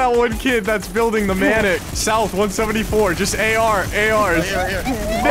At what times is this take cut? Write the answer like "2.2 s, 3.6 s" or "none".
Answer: none